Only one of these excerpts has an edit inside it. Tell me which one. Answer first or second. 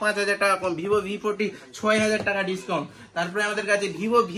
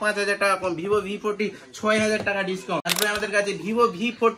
second